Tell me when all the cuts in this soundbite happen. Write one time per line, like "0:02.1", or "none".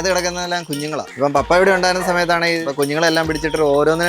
0:01.1
0:02.6